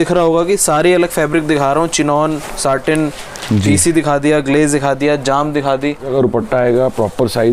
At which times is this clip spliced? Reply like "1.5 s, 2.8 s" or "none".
6.1 s